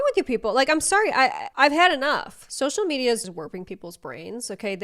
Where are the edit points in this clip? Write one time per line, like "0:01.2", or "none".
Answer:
0:02.4